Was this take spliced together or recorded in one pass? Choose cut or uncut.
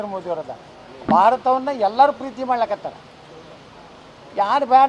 cut